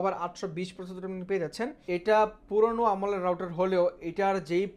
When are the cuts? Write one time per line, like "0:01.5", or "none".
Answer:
0:01.8